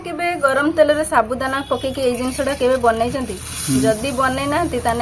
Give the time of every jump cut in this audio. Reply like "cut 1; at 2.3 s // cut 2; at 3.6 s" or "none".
none